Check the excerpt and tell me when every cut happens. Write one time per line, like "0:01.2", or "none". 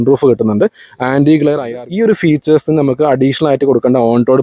0:01.7

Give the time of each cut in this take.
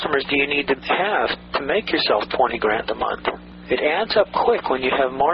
0:03.5

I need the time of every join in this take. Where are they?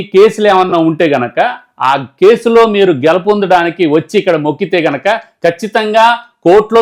none

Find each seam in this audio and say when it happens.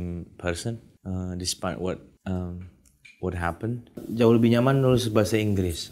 0:00.9
0:02.1
0:04.1

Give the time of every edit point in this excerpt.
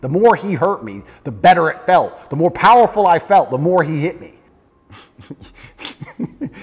0:04.3

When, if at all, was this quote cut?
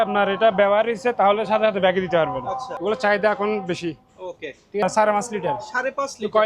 0:02.7
0:04.8

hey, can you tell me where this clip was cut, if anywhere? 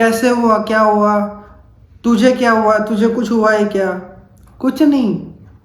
none

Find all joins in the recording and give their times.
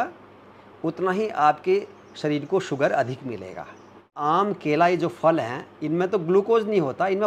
0:04.1

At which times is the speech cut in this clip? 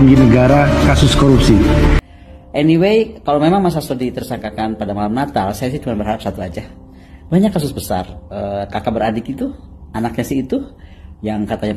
0:02.0

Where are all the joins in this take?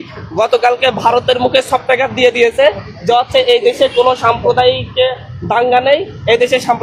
none

